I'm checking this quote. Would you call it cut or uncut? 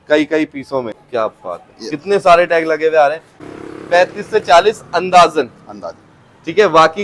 cut